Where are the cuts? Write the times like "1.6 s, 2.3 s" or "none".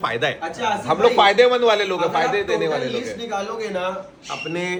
none